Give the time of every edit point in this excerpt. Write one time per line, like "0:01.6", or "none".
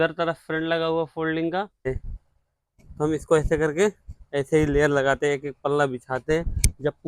0:01.9